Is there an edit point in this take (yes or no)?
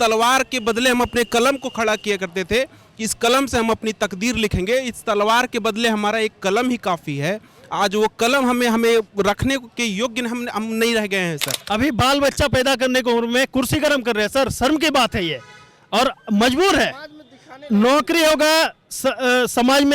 yes